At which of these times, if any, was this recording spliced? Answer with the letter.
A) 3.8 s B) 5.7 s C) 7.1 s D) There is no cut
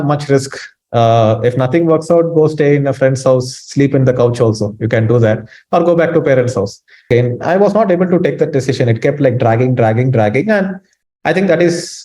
C